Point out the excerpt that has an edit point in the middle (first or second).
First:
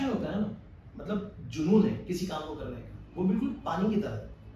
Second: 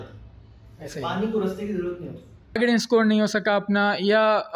second